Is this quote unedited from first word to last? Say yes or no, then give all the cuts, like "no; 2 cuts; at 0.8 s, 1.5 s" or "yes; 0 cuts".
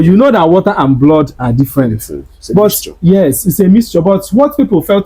no; 1 cut; at 2.3 s